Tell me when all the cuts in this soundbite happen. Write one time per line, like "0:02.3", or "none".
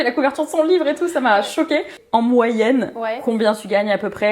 0:02.0